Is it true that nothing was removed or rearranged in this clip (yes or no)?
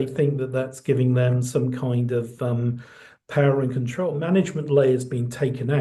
no